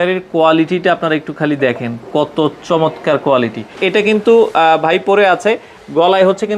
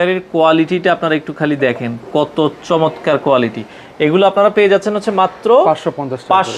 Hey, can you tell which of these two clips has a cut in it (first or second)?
first